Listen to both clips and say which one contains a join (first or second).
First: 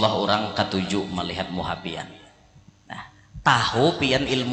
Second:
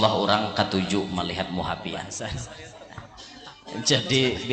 second